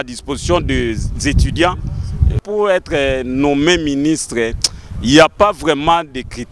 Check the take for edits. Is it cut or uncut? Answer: cut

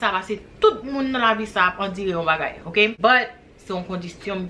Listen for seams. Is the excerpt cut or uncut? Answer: cut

